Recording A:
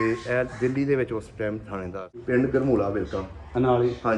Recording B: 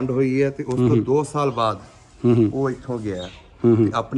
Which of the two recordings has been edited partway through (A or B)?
A